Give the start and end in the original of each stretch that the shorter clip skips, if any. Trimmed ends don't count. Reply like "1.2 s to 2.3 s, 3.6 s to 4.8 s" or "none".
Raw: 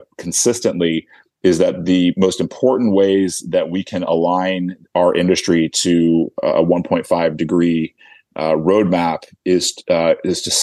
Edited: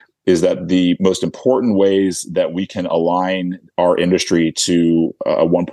none